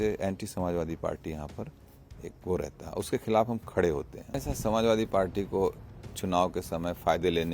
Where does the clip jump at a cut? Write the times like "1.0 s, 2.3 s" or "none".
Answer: 4.2 s